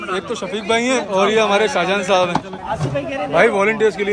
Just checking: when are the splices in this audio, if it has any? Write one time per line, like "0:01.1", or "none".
0:01.1
0:02.6